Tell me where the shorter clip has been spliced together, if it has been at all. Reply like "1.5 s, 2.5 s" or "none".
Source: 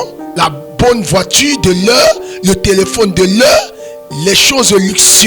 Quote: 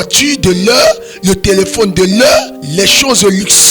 2.6 s